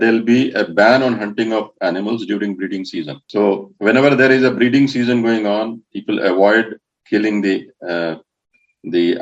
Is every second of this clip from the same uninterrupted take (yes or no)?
no